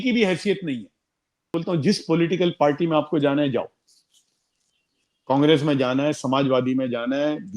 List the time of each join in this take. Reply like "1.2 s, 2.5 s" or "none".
1.5 s